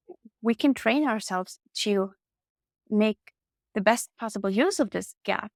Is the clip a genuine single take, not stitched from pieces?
yes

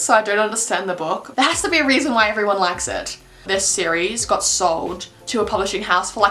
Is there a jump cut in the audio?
yes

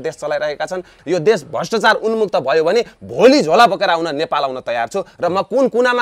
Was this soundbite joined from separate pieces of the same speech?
yes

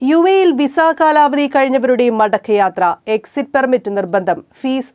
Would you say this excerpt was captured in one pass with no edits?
yes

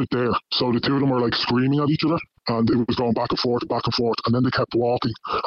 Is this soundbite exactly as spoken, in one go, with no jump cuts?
yes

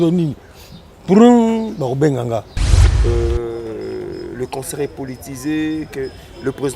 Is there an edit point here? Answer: yes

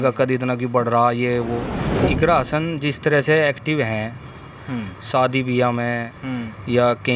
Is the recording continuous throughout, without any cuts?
no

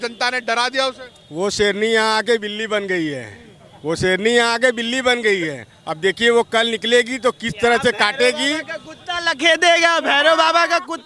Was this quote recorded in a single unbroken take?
yes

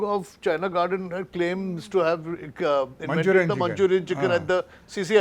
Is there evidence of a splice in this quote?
no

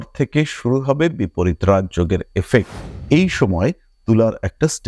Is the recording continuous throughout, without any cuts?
no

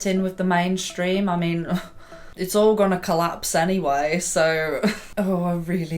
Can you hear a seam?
yes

